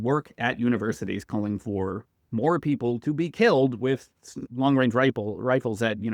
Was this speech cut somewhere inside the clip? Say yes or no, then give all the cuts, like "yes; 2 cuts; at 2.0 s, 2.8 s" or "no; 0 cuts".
yes; 1 cut; at 4.4 s